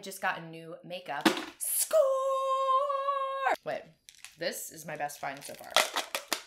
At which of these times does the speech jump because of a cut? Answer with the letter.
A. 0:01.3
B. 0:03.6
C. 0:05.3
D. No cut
B